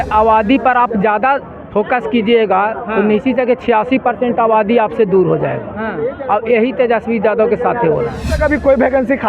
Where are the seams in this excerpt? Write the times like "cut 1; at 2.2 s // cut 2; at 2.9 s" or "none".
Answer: cut 1; at 8.3 s